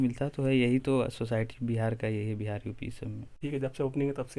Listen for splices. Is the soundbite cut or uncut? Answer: cut